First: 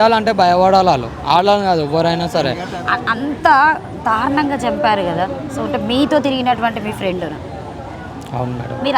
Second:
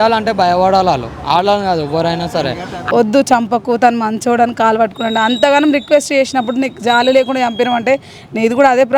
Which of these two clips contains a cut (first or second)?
second